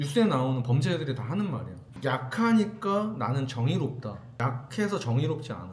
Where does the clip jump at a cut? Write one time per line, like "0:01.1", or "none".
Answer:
0:01.8